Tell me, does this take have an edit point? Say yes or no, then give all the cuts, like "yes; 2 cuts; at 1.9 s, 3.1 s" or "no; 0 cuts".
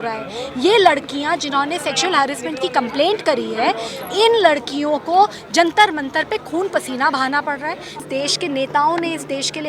yes; 1 cut; at 8.0 s